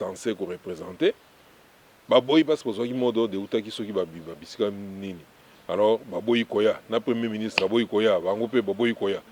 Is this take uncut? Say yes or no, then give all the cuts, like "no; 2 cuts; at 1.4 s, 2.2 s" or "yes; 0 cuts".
yes; 0 cuts